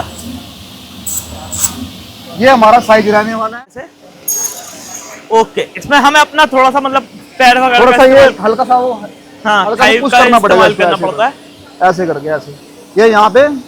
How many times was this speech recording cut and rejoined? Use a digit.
1